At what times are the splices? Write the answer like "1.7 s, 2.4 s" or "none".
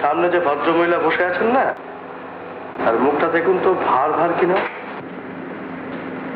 none